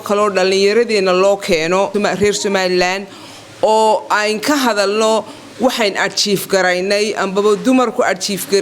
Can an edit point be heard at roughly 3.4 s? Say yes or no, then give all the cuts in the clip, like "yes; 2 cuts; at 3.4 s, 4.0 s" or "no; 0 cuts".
no; 1 cut; at 1.9 s